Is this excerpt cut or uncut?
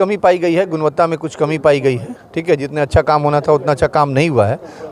uncut